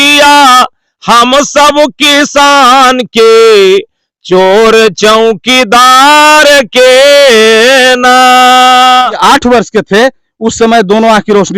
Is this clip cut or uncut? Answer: cut